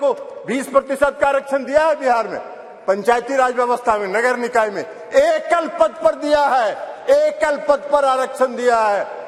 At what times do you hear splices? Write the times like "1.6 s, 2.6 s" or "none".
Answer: none